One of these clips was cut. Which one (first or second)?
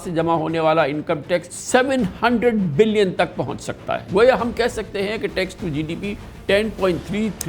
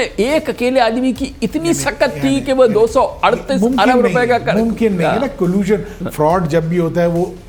first